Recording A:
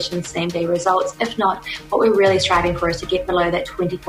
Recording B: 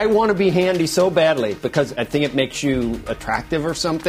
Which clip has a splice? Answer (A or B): B